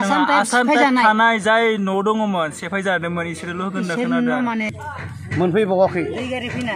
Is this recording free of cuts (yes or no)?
no